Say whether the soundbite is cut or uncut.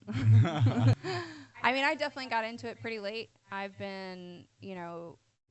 cut